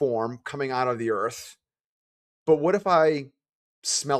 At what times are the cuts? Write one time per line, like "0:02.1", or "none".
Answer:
none